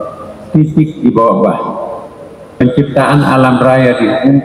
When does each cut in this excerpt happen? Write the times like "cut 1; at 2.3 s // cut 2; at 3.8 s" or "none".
cut 1; at 2.6 s